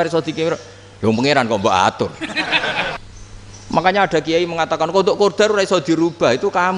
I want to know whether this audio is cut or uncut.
cut